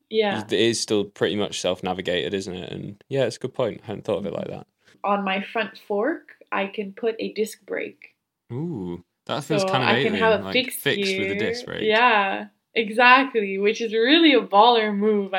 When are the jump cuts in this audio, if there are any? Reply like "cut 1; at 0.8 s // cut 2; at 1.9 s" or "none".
cut 1; at 4.9 s